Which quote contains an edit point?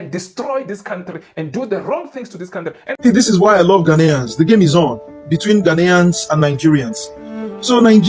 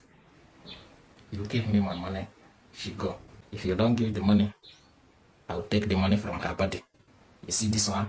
first; 1 cut; at 2.8 s

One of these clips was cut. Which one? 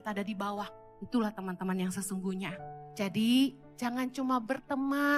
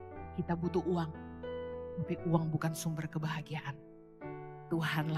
first; 2 cuts; at 2.8 s, 3.7 s

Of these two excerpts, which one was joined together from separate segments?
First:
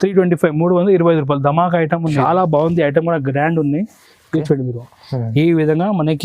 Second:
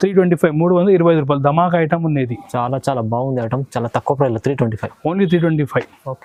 first; 1 cut; at 2.2 s

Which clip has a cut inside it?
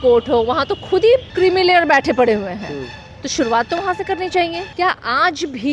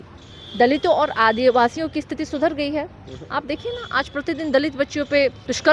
first; 2 cuts; at 1.3 s, 4.6 s

